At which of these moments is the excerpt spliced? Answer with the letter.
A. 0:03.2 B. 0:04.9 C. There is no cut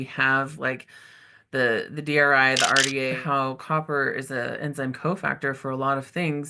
A